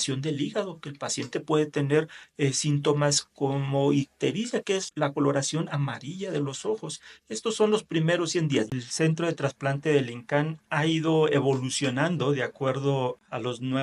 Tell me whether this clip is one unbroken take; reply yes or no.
no